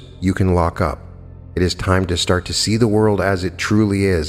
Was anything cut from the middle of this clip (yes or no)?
no